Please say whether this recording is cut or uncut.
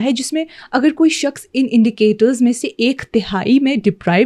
uncut